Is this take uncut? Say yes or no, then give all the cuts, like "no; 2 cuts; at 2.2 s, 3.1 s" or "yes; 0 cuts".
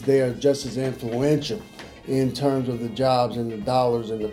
yes; 0 cuts